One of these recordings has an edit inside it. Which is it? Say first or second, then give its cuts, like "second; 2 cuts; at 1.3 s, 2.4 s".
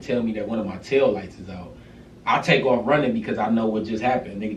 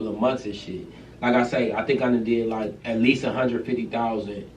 second; 1 cut; at 2.8 s